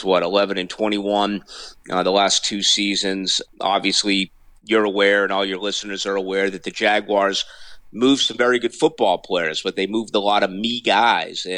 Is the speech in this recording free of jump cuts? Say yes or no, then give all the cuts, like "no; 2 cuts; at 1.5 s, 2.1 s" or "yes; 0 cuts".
no; 1 cut; at 3.4 s